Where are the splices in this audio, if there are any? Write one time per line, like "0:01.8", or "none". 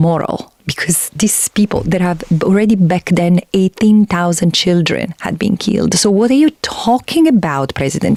none

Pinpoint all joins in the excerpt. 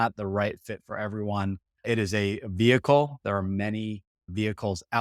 none

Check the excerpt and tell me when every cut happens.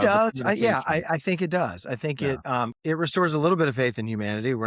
0:02.7

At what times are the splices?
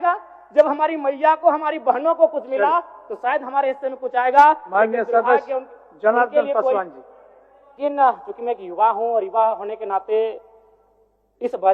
0:07.8

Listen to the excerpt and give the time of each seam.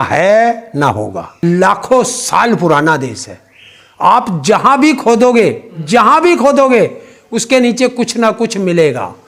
0:01.3

